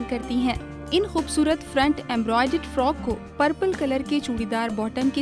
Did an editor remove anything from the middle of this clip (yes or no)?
no